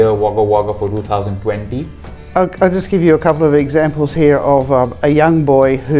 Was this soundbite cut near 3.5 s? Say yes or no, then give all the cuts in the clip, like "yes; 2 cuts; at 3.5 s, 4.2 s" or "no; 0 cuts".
no; 1 cut; at 2.1 s